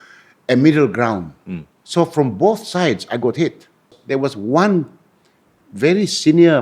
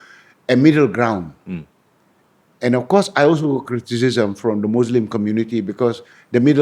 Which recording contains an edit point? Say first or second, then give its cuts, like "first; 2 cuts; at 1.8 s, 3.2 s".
first; 2 cuts; at 1.7 s, 3.9 s